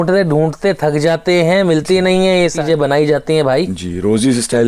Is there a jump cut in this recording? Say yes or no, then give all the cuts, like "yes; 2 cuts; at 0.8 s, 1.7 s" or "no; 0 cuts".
yes; 1 cut; at 2.6 s